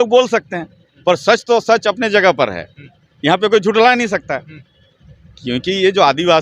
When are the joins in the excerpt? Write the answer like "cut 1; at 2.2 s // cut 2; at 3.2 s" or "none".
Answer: none